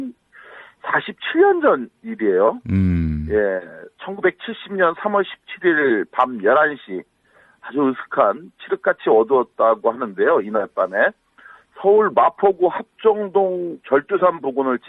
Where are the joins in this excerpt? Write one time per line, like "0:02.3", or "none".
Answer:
0:11.4